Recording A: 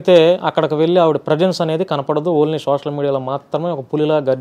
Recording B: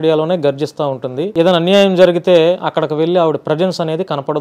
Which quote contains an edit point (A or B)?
B